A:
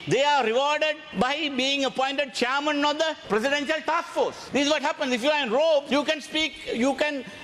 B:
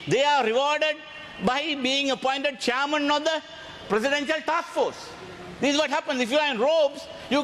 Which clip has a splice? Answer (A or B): A